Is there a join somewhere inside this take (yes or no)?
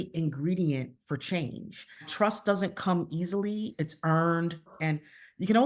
yes